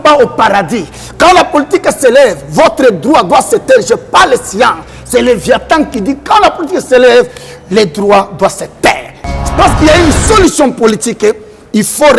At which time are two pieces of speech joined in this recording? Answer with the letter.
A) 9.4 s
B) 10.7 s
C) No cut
A